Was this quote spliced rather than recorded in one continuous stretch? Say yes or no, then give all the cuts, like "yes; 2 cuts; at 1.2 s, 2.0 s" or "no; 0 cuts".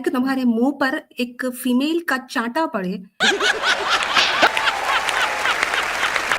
yes; 1 cut; at 3.1 s